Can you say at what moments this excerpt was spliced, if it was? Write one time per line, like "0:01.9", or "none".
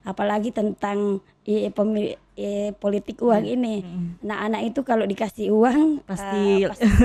none